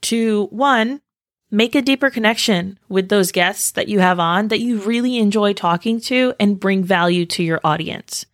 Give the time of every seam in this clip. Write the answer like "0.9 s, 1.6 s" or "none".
none